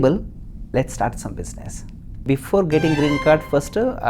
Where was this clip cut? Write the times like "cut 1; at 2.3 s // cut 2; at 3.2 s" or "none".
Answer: cut 1; at 2.2 s